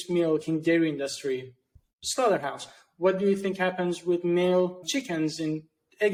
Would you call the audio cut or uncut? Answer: uncut